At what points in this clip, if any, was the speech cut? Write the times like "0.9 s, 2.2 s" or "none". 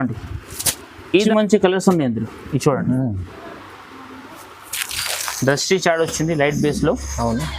1.1 s